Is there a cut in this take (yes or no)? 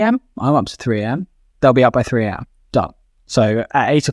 no